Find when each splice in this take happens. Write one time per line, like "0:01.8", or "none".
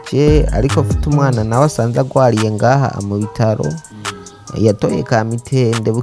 none